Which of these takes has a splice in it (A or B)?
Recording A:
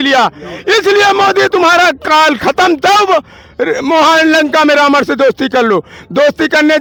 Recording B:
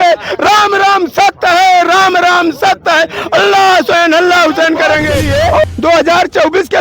B